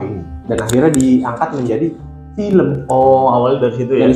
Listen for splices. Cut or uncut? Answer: uncut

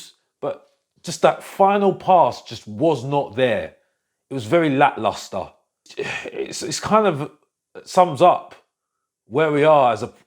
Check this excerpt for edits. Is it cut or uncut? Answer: cut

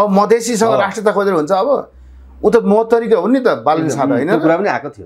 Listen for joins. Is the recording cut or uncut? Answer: uncut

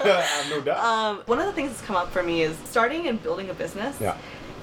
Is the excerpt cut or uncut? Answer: cut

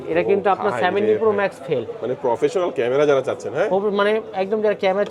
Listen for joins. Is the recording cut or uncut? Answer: uncut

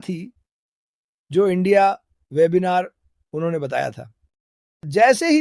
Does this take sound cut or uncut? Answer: uncut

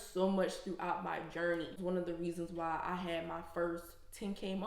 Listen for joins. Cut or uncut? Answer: cut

